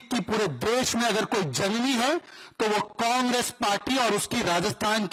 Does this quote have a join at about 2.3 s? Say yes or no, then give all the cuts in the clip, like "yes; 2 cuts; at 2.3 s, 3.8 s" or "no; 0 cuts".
no; 0 cuts